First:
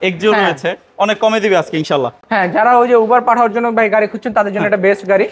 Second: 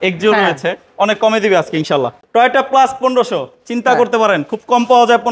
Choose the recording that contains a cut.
second; 1 cut; at 2.2 s

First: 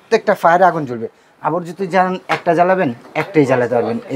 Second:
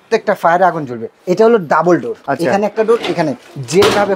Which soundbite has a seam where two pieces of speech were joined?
second; 2 cuts; at 1.1 s, 2.2 s

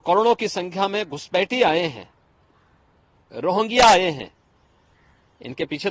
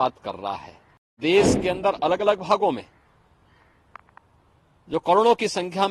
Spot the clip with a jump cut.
second; 1 cut; at 1.2 s

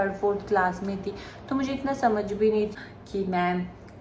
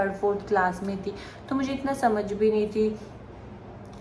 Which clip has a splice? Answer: first; 1 cut; at 2.7 s

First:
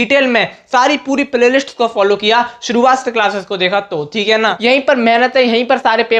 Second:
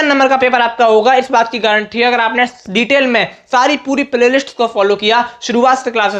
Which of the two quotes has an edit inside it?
first; 1 cut; at 4.6 s

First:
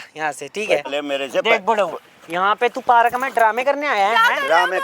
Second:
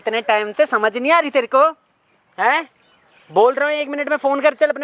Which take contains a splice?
first; 1 cut; at 0.9 s

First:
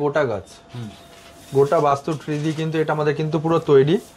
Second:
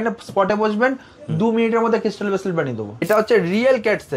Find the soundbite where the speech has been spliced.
second; 1 cut; at 3.0 s

